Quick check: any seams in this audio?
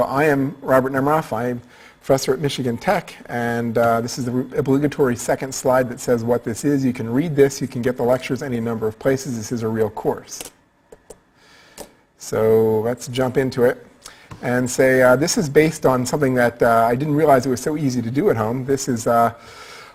no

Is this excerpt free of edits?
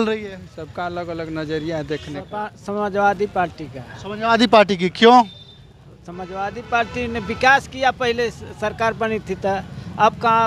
no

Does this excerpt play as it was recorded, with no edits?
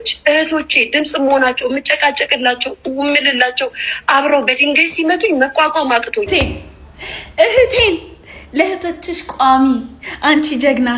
yes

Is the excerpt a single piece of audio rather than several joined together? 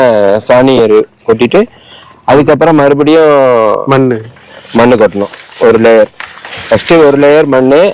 yes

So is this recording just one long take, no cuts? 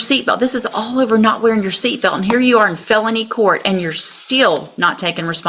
yes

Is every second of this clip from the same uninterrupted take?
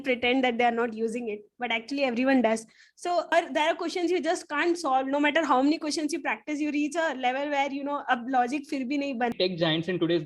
no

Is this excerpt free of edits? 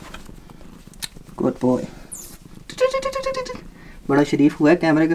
yes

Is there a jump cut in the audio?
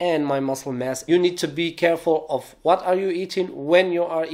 yes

